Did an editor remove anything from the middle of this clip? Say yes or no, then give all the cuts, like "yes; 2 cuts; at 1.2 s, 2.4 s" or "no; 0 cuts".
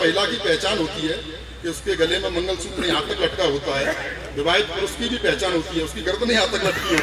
no; 0 cuts